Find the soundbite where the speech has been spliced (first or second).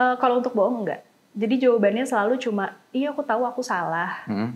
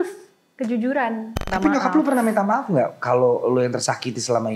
second